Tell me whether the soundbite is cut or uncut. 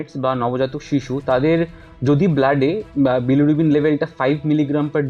uncut